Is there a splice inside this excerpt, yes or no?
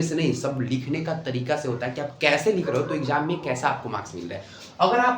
no